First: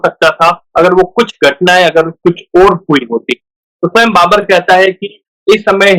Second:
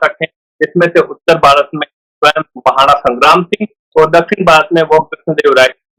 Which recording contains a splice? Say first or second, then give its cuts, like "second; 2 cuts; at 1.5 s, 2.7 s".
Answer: first; 1 cut; at 3.6 s